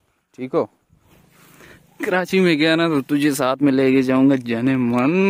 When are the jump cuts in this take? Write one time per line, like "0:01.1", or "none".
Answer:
0:01.1